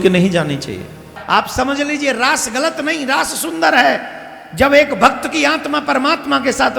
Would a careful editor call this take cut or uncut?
cut